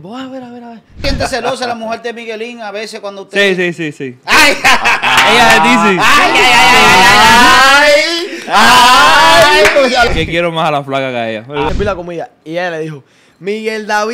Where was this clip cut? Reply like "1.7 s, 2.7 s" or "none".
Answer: 1.1 s, 10.1 s, 11.7 s